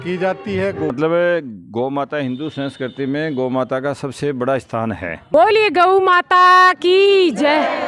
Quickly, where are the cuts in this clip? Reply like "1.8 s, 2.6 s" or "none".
0.9 s, 5.3 s

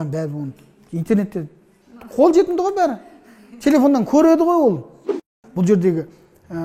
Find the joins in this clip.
5.4 s

